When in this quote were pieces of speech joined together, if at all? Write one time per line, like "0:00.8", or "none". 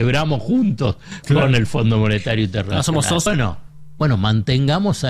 0:03.3

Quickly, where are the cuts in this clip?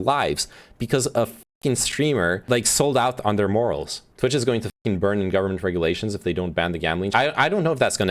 none

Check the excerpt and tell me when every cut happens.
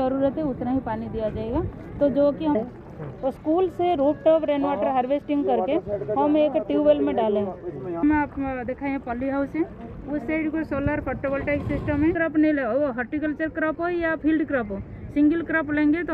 0:02.5
0:08.0
0:12.2

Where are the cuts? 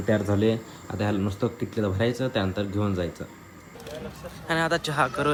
none

